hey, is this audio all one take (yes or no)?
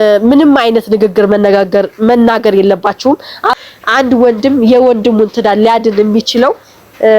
no